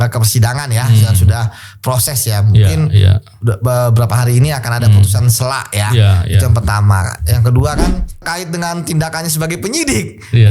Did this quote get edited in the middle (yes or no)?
yes